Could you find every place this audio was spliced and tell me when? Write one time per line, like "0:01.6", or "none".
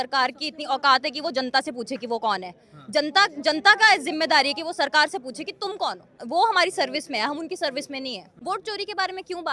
0:06.2
0:08.3